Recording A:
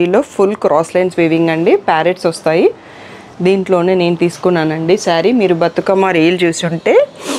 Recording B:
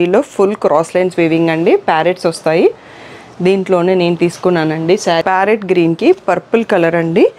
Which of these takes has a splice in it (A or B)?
B